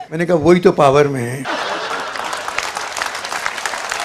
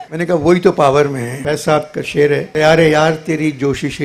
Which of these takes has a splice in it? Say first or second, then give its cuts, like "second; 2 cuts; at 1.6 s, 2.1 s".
second; 1 cut; at 1.3 s